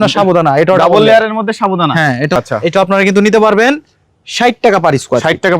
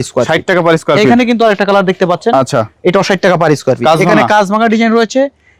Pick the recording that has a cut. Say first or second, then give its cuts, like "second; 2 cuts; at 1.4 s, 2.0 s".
first; 1 cut; at 2.4 s